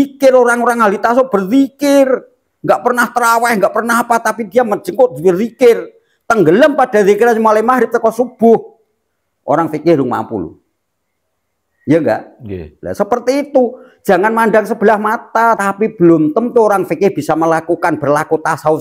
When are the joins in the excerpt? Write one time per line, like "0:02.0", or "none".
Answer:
0:15.6